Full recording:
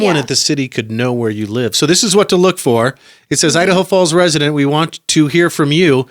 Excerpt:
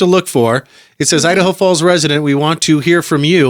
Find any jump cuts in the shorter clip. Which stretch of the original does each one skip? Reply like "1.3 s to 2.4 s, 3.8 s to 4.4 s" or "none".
4.9 s to 5.0 s